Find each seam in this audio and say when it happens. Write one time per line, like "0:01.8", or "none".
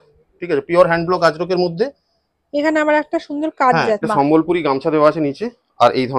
0:04.0